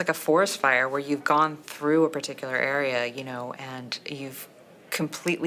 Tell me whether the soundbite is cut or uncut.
uncut